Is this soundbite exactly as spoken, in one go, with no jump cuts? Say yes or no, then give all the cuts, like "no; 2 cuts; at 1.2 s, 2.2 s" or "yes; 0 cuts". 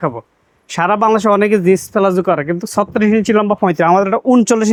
yes; 0 cuts